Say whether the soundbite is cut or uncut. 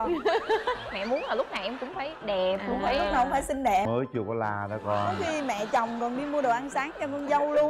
cut